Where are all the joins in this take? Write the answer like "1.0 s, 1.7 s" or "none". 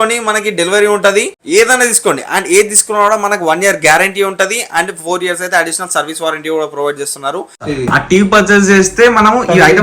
1.4 s, 7.7 s

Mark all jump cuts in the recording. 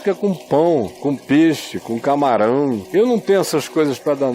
0.9 s, 2.8 s

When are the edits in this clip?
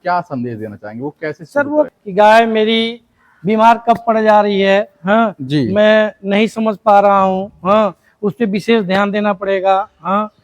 1.9 s

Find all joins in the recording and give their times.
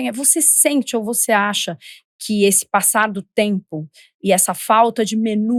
none

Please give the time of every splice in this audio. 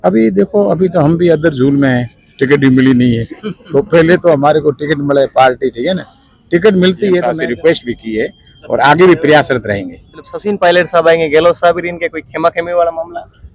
7.3 s, 10.3 s

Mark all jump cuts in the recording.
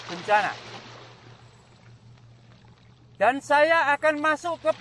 0.9 s, 3.2 s

